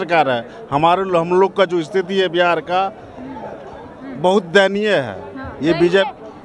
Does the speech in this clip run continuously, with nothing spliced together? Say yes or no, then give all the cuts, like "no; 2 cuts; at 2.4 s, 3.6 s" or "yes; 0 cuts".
yes; 0 cuts